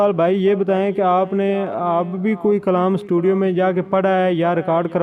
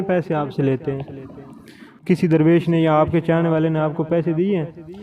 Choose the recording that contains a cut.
second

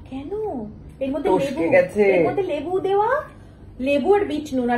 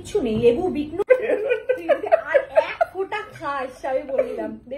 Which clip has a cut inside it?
second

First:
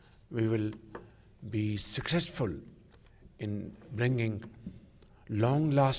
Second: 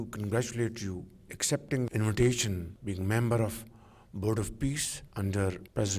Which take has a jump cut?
second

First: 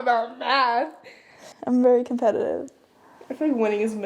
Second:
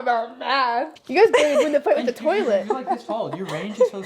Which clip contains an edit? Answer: second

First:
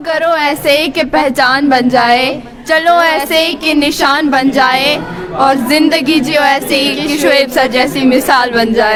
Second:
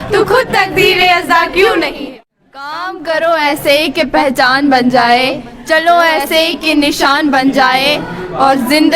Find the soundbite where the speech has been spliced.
second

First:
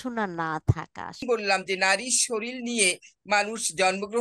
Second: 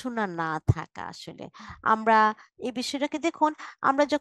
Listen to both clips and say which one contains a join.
first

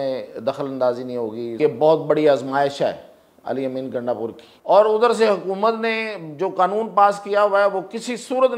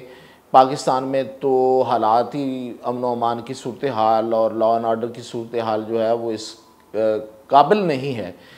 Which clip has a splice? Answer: first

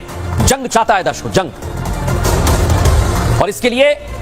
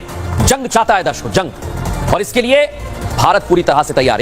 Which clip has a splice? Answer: second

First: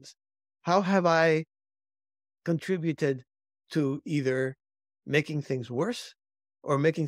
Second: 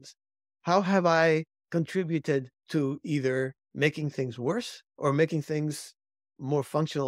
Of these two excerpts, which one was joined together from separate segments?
second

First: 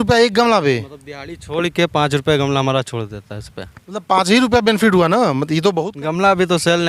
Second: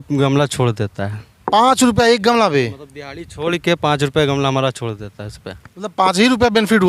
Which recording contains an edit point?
first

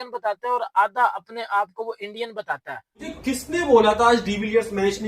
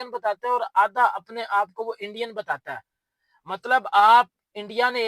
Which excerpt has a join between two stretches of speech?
first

